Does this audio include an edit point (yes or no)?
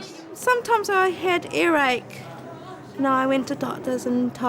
no